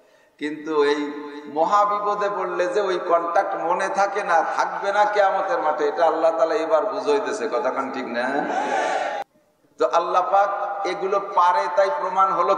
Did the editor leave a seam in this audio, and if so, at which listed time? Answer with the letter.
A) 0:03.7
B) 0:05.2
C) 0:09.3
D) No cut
C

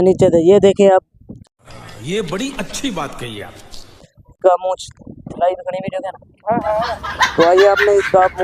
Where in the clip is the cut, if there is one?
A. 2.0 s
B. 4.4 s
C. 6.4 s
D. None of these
B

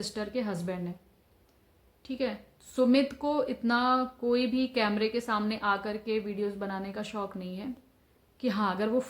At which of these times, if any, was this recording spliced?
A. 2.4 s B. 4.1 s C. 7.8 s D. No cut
C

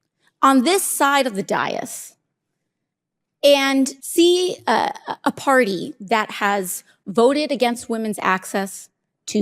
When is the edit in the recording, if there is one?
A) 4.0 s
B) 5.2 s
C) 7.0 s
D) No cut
A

